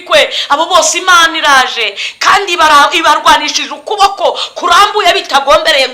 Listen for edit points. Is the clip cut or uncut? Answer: uncut